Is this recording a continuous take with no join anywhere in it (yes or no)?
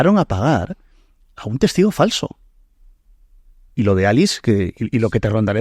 yes